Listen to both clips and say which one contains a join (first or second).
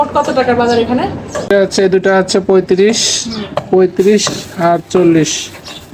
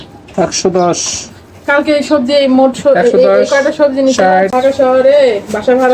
second